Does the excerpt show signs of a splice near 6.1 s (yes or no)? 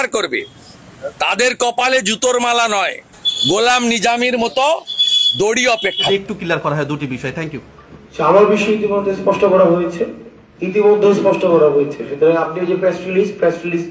yes